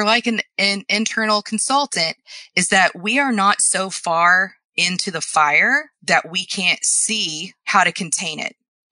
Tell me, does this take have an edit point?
yes; 1 cut; at 7.6 s

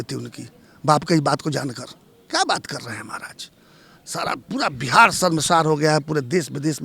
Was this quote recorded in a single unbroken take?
yes; 0 cuts

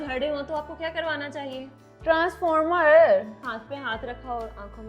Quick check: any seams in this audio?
yes; 1 cut; at 3.4 s

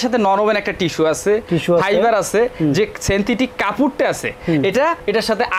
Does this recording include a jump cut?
no; 0 cuts

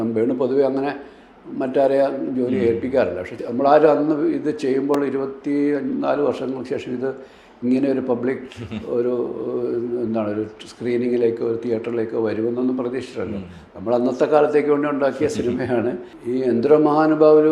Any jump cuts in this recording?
yes; 2 cuts; at 3.3 s, 16.1 s

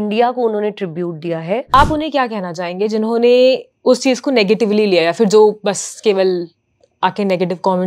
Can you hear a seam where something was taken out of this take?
yes; 1 cut; at 1.7 s

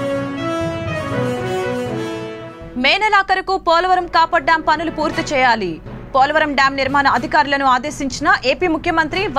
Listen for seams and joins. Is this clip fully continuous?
no; 1 cut; at 2.4 s

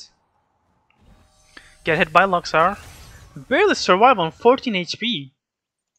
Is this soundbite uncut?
yes; 0 cuts

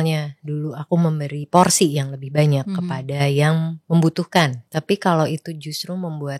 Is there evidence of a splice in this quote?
yes; 2 cuts; at 3.8 s, 4.6 s

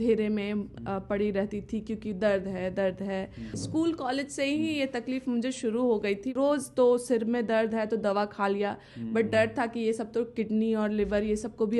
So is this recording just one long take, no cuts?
no; 2 cuts; at 3.5 s, 6.3 s

